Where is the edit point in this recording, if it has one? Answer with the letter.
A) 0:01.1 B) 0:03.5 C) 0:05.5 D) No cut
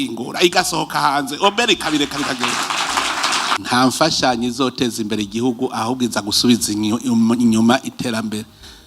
B